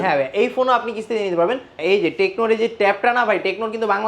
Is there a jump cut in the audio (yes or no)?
yes